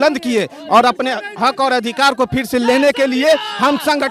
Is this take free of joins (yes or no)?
yes